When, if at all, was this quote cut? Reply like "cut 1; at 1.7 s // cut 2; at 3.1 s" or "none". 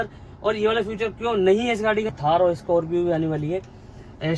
cut 1; at 2.1 s